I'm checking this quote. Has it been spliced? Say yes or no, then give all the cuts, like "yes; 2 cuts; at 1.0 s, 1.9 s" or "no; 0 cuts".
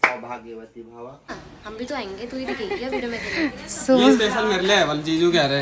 yes; 1 cut; at 1.3 s